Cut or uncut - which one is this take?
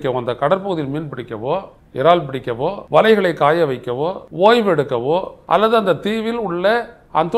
cut